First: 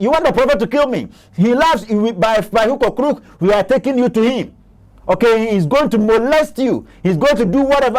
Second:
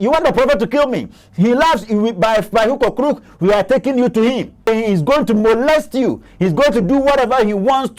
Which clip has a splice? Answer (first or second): second